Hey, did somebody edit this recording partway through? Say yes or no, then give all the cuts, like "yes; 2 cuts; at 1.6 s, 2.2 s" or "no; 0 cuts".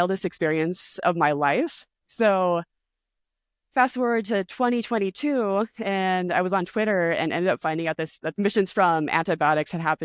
yes; 1 cut; at 8.4 s